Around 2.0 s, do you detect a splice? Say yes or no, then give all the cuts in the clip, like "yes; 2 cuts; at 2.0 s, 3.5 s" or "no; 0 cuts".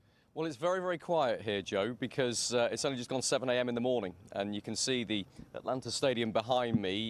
yes; 1 cut; at 2.0 s